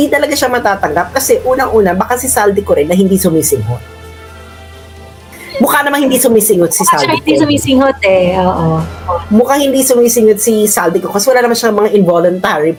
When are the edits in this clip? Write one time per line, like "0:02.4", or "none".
none